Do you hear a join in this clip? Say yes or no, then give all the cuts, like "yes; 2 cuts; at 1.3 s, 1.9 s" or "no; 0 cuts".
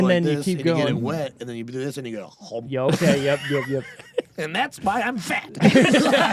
no; 0 cuts